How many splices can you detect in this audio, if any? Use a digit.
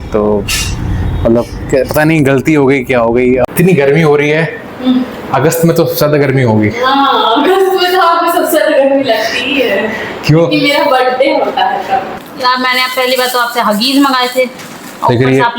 2